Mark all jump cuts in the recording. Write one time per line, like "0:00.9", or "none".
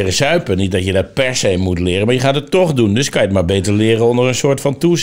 none